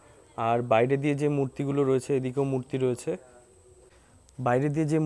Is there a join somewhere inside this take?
no; 0 cuts

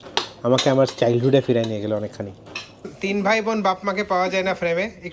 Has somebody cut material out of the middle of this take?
yes; 1 cut; at 2.9 s

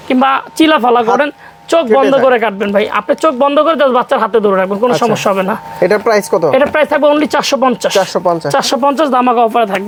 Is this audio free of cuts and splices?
yes; 0 cuts

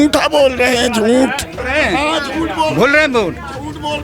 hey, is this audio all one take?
no; 1 cut; at 1.6 s

